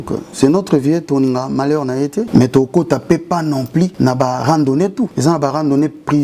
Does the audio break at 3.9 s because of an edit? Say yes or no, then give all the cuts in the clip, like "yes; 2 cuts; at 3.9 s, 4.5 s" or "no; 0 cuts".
yes; 3 cuts; at 2.3 s, 3.9 s, 5.1 s